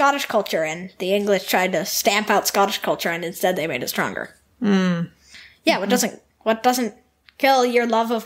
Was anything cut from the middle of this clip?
no; 0 cuts

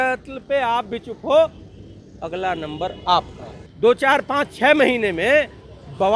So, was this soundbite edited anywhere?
yes; 1 cut; at 3.6 s

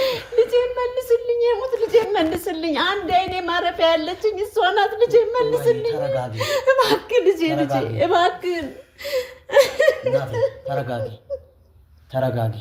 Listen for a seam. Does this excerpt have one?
no; 0 cuts

